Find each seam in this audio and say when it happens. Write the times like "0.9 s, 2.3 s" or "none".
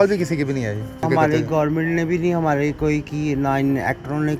1.0 s